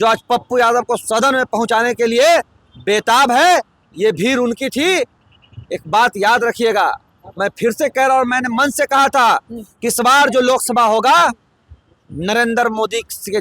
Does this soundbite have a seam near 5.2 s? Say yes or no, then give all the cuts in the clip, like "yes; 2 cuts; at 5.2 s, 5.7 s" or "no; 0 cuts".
no; 0 cuts